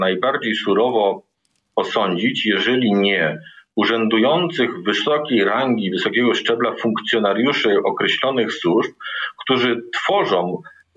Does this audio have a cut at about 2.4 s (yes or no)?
no